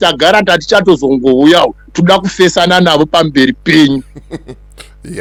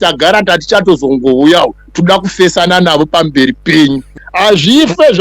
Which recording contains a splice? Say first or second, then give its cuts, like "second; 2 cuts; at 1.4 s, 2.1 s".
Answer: second; 1 cut; at 4.2 s